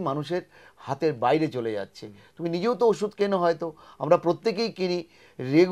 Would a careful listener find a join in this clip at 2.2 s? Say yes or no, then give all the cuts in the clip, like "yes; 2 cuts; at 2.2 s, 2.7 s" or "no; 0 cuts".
no; 0 cuts